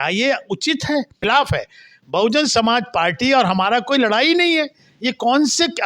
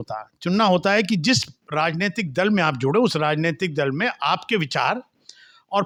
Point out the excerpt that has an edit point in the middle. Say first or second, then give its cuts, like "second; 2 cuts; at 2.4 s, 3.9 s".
first; 1 cut; at 1.2 s